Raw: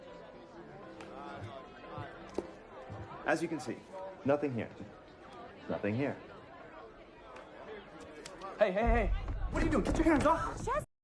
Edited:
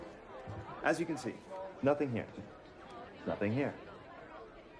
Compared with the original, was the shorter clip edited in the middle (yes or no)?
no